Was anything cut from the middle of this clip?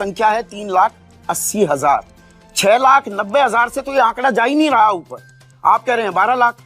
no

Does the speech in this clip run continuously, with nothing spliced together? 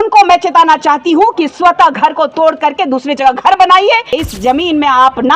no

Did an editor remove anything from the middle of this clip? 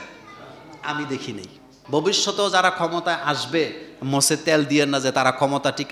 yes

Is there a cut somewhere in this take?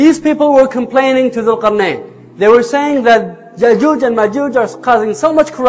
no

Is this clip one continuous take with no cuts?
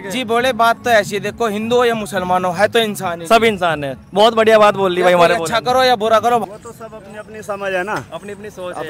no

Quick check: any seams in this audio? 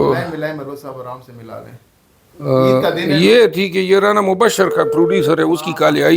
no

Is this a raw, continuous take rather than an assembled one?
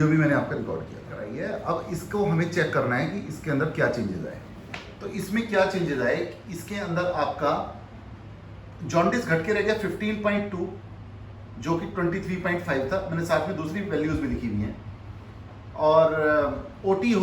no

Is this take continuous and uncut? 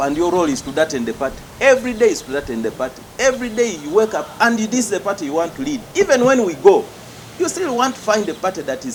yes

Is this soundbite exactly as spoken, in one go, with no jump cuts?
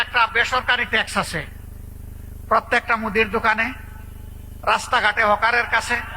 yes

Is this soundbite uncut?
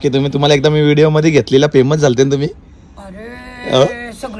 yes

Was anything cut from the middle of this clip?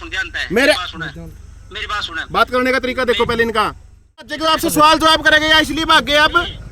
yes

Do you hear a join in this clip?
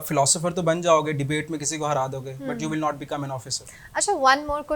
no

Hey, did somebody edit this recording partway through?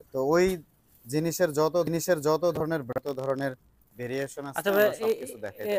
no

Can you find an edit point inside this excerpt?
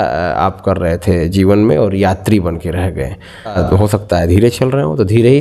yes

